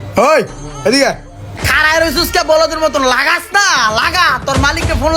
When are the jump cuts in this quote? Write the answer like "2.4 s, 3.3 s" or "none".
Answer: 1.7 s